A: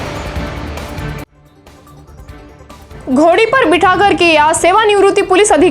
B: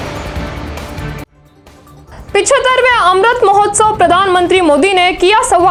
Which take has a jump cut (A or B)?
A